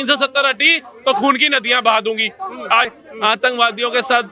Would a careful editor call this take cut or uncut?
cut